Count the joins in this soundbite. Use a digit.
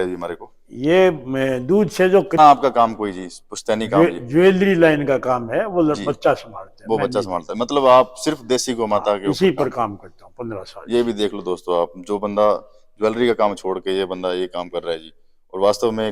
1